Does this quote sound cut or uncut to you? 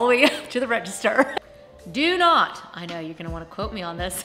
cut